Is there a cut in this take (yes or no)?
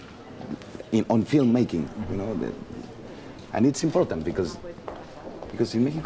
yes